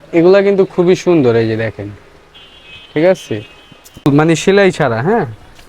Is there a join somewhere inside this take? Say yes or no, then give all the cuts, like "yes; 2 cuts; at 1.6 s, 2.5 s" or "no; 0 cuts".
yes; 1 cut; at 4.1 s